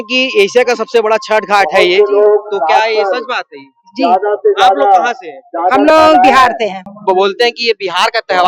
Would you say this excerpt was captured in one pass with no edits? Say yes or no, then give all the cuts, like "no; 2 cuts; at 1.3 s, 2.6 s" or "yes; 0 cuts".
no; 1 cut; at 6.9 s